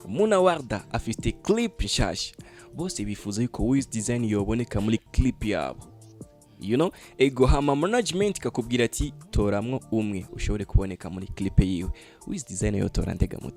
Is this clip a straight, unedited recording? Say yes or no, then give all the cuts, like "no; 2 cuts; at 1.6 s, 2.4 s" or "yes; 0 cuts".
yes; 0 cuts